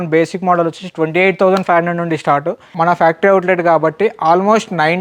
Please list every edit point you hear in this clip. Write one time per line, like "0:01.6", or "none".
0:02.7